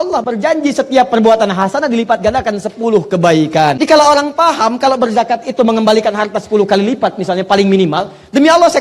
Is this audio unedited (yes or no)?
no